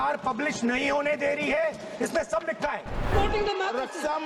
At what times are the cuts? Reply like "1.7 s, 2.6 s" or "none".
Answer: 3.1 s